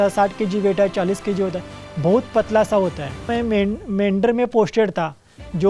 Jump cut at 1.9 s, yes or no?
no